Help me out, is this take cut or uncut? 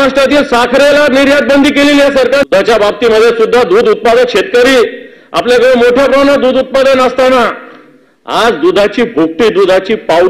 cut